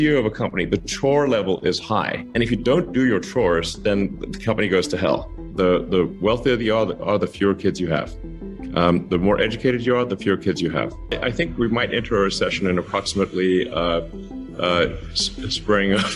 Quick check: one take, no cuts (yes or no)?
no